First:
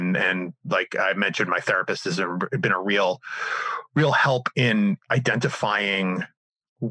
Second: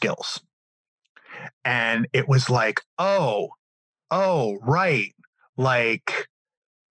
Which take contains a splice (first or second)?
first